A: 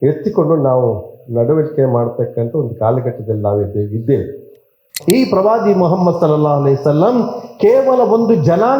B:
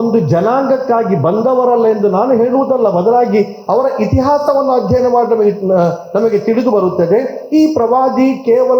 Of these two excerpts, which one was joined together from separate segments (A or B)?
A